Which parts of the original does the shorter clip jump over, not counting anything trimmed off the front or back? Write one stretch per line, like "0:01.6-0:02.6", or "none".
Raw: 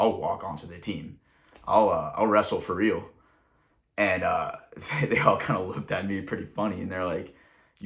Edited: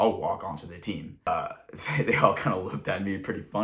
0:01.3-0:04.3